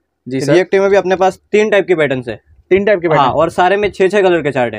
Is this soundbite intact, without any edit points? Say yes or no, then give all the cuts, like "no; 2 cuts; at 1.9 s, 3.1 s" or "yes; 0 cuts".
yes; 0 cuts